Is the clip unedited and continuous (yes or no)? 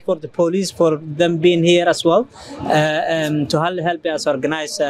yes